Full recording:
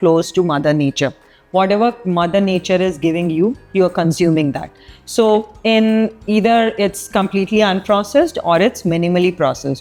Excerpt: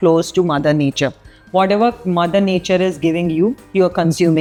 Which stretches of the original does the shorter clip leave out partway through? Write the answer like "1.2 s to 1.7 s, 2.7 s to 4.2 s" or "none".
none